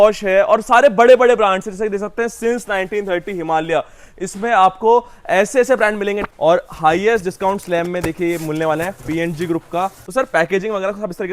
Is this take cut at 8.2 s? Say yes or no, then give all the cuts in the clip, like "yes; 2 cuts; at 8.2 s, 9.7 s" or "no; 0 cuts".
no; 2 cuts; at 6.3 s, 10.0 s